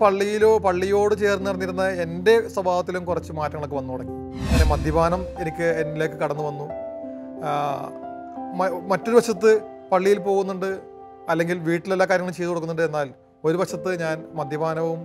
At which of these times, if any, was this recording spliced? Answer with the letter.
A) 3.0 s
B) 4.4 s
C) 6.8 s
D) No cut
B